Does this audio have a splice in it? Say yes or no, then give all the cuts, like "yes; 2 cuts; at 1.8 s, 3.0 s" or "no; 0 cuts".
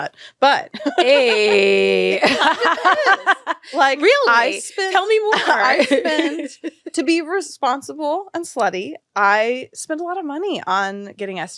no; 0 cuts